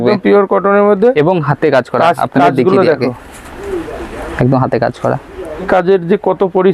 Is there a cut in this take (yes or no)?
yes